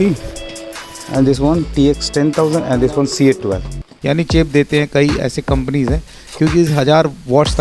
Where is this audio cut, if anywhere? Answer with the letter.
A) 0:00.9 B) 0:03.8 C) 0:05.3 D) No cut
B